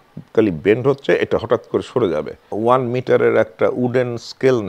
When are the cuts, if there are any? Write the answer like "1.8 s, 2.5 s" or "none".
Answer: 2.4 s